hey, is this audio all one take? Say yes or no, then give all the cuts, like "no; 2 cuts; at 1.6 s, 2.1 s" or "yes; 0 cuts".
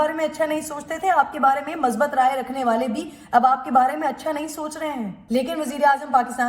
no; 1 cut; at 5.2 s